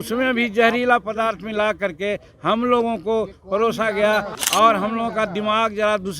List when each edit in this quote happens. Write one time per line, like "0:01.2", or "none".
0:04.3

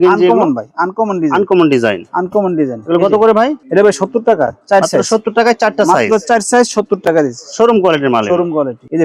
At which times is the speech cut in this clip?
none

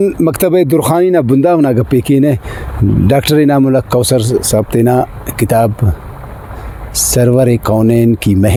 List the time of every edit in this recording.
none

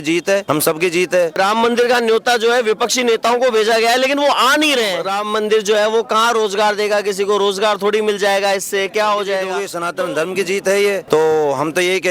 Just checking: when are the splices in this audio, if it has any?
0:01.4
0:05.1
0:09.7

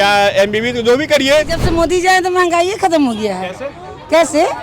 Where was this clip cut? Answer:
0:01.6

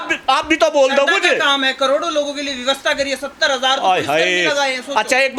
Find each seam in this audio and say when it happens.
none

